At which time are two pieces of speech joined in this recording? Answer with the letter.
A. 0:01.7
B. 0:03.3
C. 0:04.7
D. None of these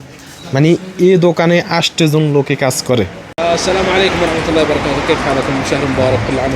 B